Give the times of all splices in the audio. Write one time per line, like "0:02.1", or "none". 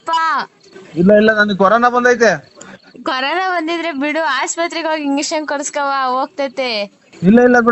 none